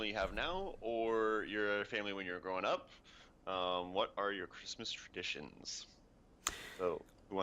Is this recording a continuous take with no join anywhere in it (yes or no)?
no